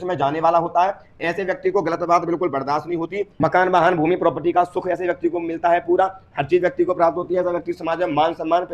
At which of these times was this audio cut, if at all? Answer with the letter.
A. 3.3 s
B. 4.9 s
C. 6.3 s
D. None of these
A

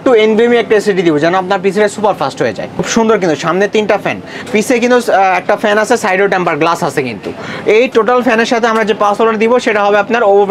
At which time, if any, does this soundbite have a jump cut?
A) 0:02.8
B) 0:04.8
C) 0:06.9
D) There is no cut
A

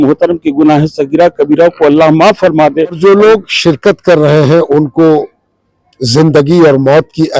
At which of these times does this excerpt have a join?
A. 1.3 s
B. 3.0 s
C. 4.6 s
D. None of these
B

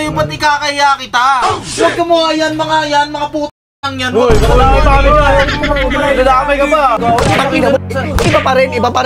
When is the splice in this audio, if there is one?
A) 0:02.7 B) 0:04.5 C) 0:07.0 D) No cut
C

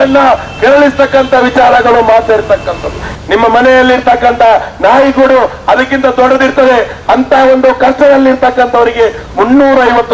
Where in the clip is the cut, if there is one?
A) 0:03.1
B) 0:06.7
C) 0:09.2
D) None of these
A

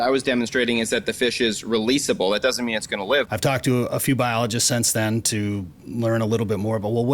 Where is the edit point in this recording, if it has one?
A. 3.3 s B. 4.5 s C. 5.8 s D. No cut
A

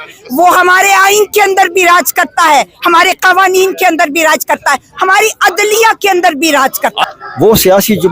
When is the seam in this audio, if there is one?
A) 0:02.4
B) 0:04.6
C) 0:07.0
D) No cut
C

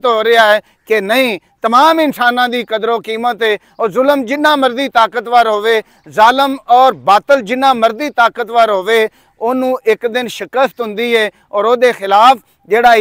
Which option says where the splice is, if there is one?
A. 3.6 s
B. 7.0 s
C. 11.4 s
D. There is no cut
D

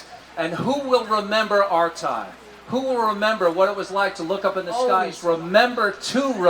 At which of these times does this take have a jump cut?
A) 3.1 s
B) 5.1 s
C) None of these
B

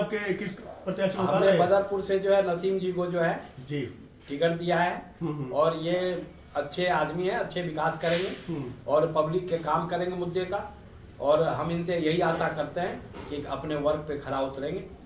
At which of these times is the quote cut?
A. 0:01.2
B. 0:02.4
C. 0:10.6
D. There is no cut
B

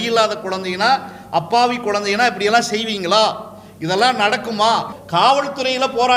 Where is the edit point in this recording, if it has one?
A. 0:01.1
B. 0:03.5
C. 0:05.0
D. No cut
C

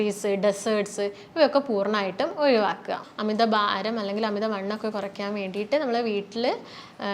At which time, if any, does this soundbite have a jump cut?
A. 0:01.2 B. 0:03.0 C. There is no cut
B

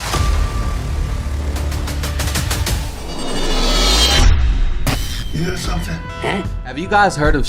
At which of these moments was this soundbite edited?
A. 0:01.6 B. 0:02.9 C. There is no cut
B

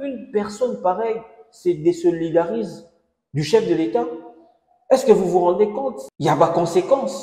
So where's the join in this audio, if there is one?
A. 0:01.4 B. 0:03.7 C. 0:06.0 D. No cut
C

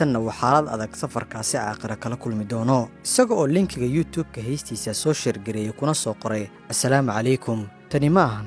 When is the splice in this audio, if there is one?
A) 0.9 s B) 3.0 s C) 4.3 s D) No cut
B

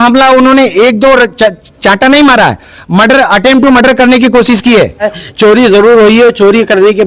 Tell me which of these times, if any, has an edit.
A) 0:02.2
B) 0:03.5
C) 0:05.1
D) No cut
C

